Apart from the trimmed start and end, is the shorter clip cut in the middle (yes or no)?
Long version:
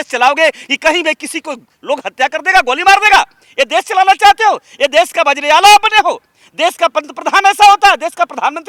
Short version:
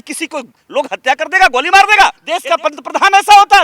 yes